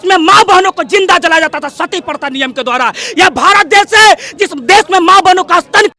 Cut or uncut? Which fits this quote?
uncut